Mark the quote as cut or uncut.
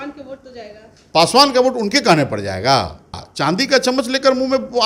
cut